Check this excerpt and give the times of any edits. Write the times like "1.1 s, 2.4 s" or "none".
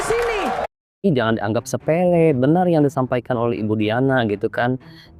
1.1 s